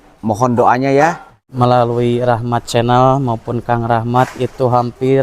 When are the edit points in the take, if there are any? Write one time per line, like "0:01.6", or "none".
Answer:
0:01.4